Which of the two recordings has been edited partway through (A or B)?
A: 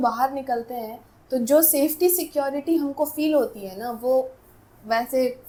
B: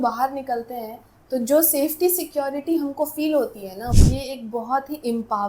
B